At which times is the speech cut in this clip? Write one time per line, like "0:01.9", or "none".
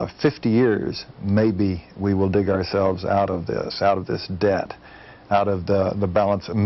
none